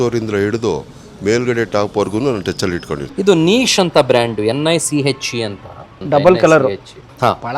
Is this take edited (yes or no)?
yes